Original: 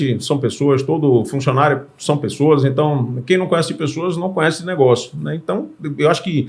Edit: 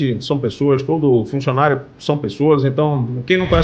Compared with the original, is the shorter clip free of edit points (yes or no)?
yes